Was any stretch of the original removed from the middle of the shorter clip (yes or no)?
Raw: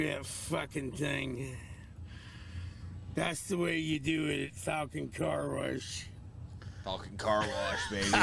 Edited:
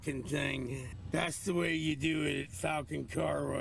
yes